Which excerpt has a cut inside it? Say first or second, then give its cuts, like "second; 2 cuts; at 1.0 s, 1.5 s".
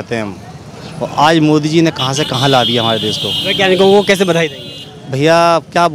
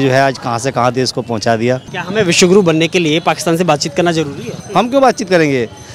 second; 2 cuts; at 1.9 s, 4.6 s